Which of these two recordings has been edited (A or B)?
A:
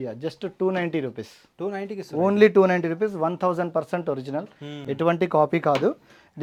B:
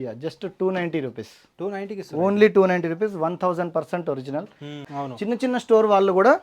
B